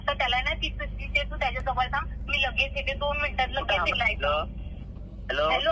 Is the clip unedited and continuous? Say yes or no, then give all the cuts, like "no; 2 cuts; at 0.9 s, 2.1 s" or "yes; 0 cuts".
no; 1 cut; at 3.9 s